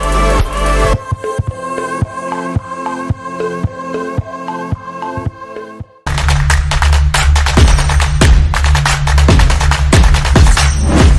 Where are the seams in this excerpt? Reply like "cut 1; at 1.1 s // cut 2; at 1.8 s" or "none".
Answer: none